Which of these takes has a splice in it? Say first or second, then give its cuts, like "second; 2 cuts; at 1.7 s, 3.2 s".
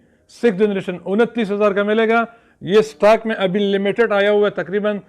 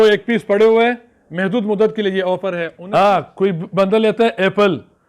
second; 1 cut; at 2.7 s